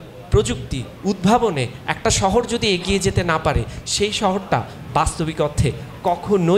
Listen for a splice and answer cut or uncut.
uncut